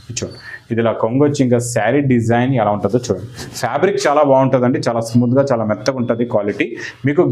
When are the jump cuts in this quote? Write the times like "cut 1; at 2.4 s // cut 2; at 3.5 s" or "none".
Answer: none